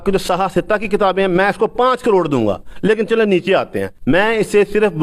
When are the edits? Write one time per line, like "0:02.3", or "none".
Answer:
0:03.9